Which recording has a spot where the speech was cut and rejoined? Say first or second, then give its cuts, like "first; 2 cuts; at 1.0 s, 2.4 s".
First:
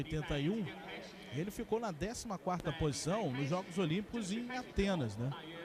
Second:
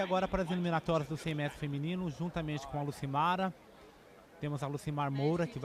first; 1 cut; at 3.2 s